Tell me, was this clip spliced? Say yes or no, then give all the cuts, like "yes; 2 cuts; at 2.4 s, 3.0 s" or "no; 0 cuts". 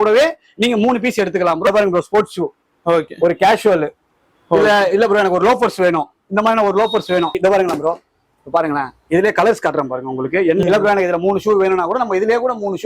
yes; 3 cuts; at 1.7 s, 7.3 s, 10.6 s